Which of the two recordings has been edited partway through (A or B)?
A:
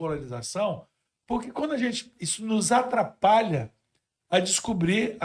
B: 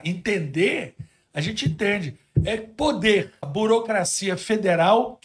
B